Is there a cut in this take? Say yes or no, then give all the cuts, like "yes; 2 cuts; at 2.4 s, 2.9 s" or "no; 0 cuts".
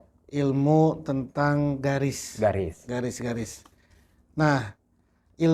no; 0 cuts